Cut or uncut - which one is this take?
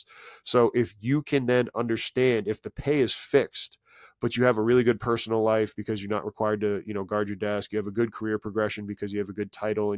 uncut